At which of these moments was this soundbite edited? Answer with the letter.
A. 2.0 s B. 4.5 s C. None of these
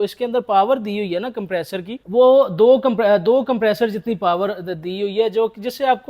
A